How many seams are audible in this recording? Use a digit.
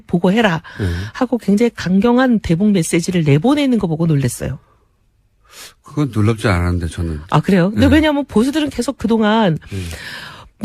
1